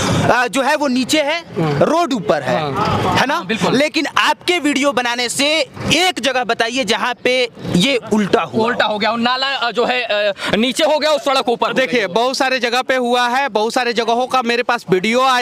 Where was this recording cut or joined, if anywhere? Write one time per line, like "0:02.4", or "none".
none

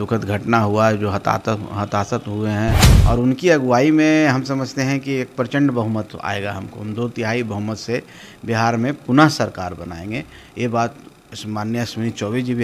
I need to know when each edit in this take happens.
0:02.9

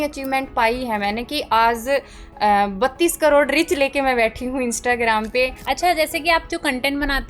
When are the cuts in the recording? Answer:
0:05.6

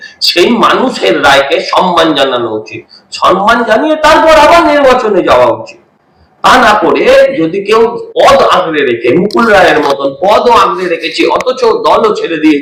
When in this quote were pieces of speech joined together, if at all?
none

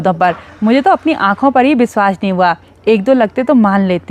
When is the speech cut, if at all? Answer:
none

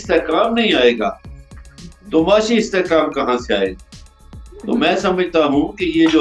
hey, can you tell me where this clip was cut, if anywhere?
none

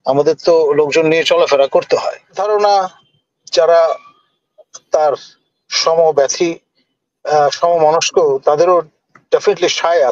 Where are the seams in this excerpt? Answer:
0:02.4

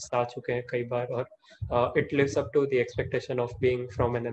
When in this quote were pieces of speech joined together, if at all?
none

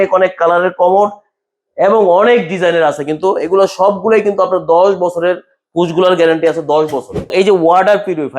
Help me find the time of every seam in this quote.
0:07.3

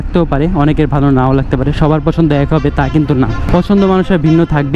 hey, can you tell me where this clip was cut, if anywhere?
0:03.4

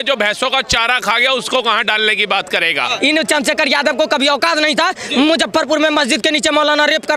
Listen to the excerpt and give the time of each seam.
0:02.9

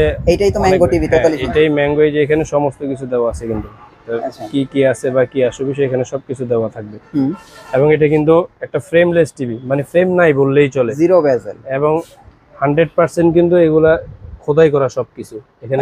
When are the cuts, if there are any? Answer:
none

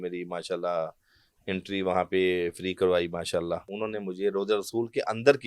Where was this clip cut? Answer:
0:03.7

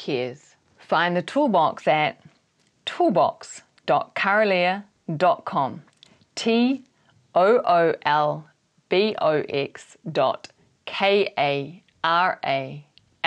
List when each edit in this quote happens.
none

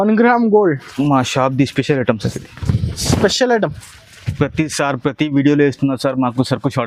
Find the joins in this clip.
none

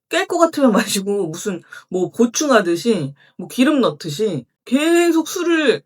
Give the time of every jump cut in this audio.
0:04.5

